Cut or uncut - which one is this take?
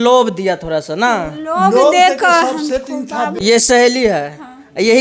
cut